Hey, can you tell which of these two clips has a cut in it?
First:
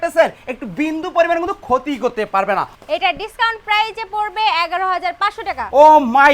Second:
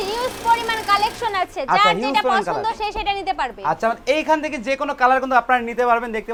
first; 1 cut; at 2.7 s

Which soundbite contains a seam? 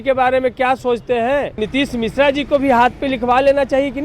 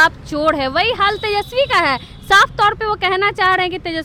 first; 1 cut; at 1.6 s

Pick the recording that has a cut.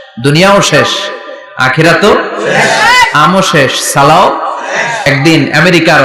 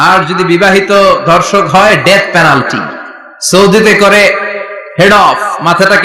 first; 1 cut; at 5.1 s

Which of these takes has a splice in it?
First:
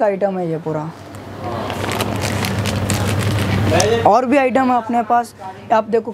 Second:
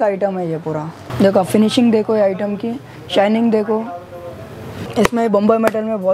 second; 2 cuts; at 1.1 s, 4.9 s

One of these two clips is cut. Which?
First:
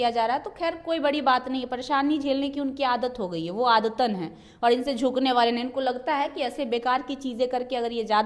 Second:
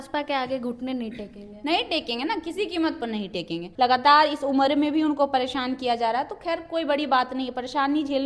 second; 1 cut; at 3.6 s

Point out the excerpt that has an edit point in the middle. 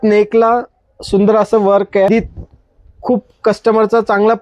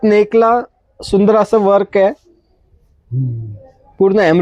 first; 1 cut; at 2.1 s

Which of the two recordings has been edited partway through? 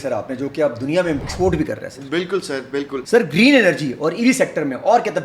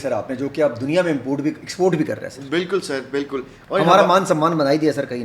first; 2 cuts; at 1.2 s, 3.0 s

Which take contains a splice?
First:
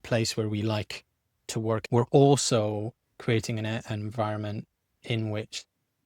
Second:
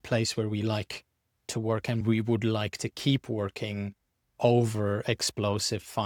first; 1 cut; at 1.8 s

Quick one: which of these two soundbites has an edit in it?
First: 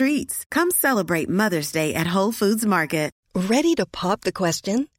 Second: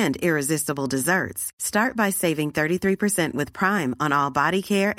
first; 1 cut; at 3.2 s

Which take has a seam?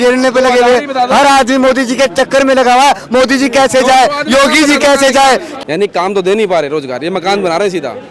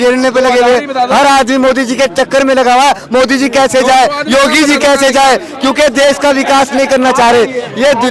first; 1 cut; at 5.5 s

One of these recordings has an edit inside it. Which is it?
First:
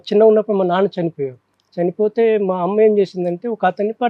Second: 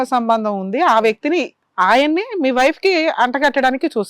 second; 1 cut; at 1.6 s

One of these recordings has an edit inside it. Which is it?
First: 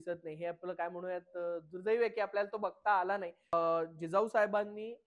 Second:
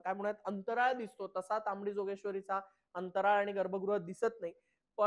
first; 1 cut; at 3.5 s

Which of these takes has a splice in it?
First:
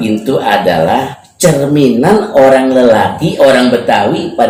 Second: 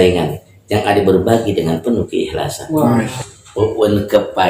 second; 1 cut; at 3.1 s

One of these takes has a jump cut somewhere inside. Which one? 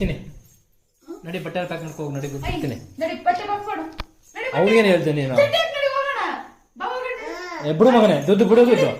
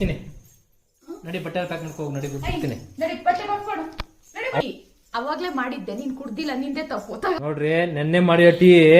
second; 2 cuts; at 4.6 s, 7.4 s

